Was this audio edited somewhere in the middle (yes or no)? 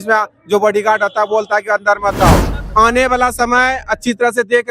yes